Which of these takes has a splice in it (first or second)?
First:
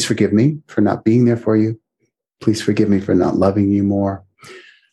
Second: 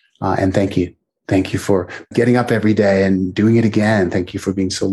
second